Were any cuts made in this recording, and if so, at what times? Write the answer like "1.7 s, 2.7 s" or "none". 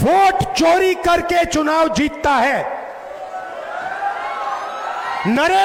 none